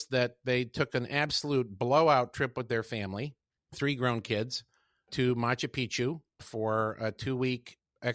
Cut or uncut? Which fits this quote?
uncut